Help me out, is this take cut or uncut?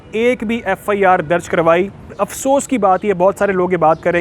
cut